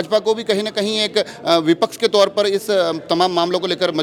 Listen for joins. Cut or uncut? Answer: uncut